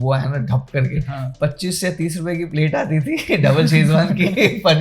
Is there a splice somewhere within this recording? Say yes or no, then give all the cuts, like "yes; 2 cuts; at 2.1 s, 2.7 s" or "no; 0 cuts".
yes; 1 cut; at 1.3 s